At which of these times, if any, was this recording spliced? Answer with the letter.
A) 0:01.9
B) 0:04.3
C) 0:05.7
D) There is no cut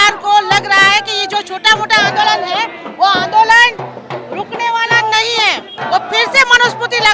C